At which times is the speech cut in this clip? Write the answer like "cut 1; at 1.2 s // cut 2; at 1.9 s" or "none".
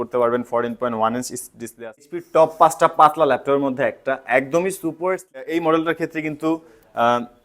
cut 1; at 2.2 s // cut 2; at 5.4 s